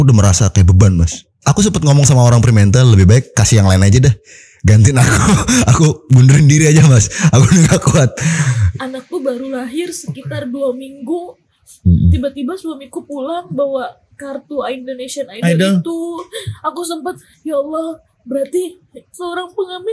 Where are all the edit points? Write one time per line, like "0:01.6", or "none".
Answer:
0:01.4
0:08.6
0:17.3
0:19.0